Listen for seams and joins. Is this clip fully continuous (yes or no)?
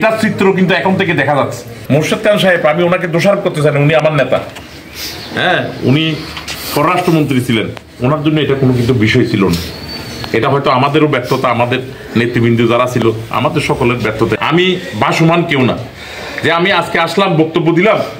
no